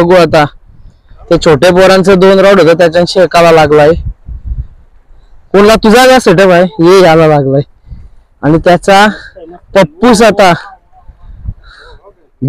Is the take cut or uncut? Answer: uncut